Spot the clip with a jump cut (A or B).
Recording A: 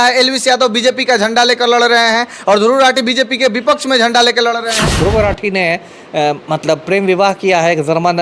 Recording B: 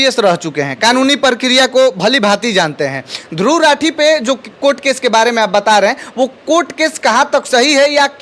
A